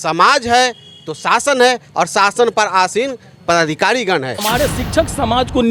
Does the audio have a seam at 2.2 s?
no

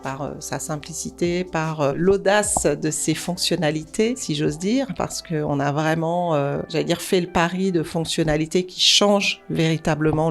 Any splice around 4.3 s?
yes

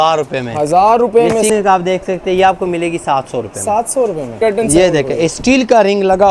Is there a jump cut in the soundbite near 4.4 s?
yes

